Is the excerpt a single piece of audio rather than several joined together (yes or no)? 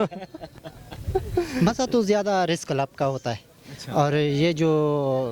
no